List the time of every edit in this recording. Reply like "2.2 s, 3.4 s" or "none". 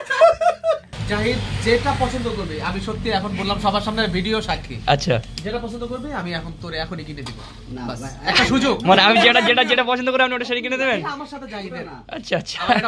0.9 s

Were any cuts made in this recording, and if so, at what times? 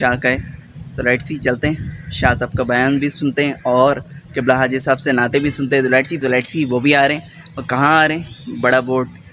6.2 s

